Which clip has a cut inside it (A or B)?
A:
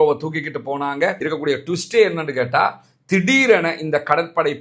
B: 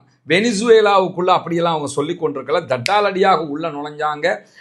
A